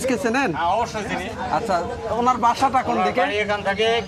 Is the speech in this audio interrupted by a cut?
no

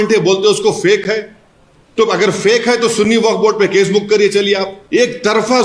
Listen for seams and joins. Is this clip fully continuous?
no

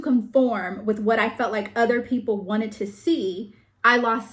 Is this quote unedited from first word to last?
yes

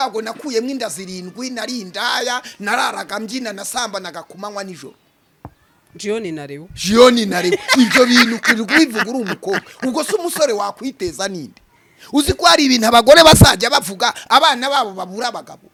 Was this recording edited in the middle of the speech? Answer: no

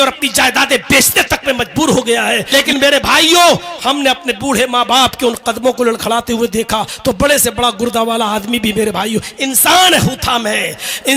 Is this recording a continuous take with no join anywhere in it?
no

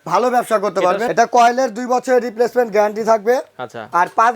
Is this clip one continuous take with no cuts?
no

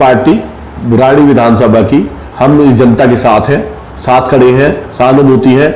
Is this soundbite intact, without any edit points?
yes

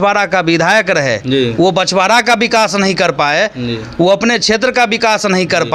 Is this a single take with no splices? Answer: yes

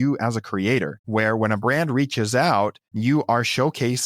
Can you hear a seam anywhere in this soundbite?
yes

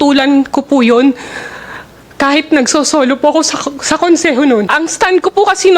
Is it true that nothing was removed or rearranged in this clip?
no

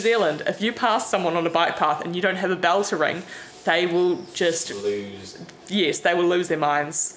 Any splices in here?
no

